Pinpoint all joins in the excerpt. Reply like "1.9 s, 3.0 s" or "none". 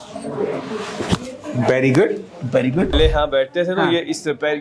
3.0 s

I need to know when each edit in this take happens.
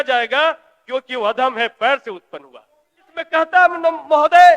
3.2 s

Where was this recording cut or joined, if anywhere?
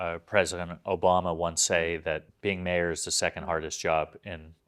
2.3 s

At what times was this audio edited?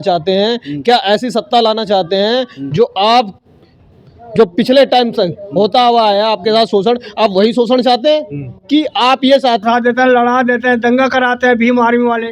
9.6 s

